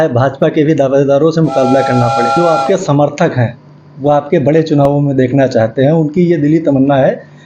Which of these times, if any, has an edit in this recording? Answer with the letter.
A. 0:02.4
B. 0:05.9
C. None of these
A